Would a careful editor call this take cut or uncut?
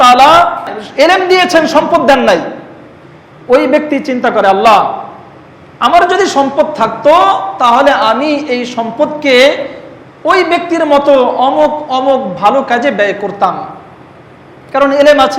uncut